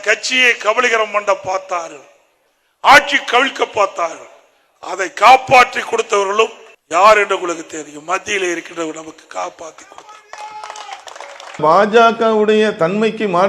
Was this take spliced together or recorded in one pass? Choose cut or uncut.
cut